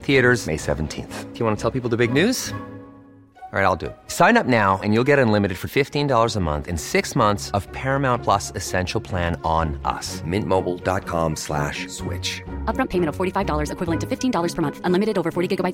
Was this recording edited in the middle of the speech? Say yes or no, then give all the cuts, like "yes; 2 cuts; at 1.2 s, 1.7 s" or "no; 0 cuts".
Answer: no; 0 cuts